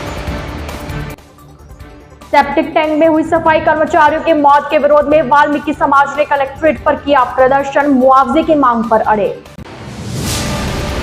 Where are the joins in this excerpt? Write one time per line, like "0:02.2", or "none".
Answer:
0:00.9